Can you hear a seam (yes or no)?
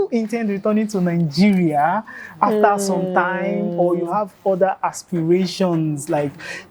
no